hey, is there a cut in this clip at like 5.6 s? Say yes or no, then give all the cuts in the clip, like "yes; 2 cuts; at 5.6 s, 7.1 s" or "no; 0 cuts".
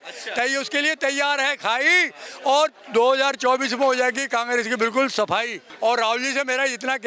yes; 1 cut; at 5.6 s